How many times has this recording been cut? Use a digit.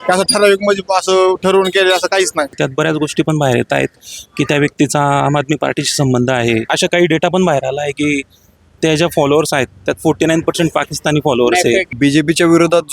3